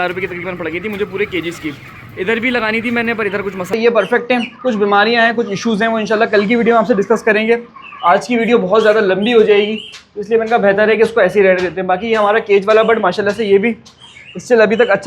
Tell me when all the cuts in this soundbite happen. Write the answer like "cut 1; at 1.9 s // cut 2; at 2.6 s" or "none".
cut 1; at 3.7 s